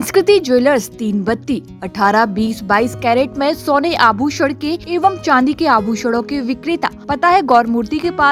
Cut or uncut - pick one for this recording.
cut